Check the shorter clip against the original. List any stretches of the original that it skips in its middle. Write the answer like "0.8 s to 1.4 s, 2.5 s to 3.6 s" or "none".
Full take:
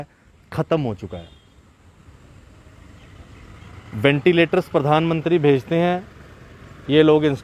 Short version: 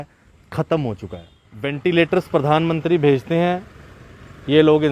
1.8 s to 4.2 s